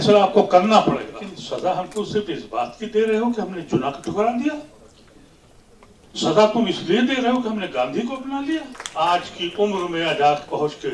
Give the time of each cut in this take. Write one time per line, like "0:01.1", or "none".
0:01.3
0:08.8